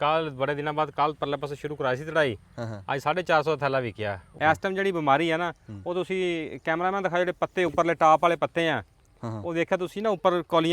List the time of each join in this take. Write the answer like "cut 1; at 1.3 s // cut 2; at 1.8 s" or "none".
cut 1; at 4.3 s